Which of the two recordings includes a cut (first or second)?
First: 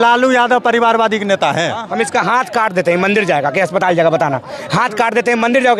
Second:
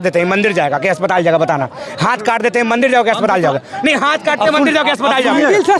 first